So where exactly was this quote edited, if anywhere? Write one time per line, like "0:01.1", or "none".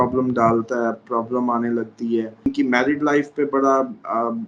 0:02.5